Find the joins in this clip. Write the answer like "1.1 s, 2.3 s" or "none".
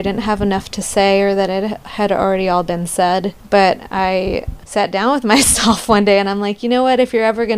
3.4 s, 4.5 s